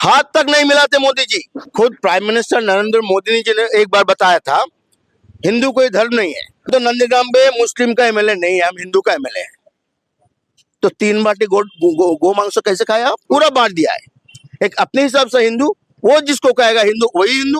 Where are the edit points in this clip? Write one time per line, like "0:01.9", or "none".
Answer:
0:01.6
0:06.6
0:13.2

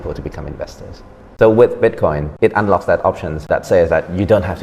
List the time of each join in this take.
0:01.2
0:02.3
0:03.5

